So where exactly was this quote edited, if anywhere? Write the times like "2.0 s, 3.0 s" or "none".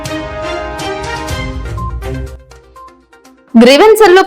1.2 s